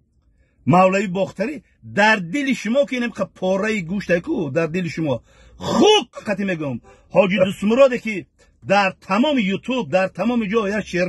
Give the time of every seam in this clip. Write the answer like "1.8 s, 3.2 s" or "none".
6.2 s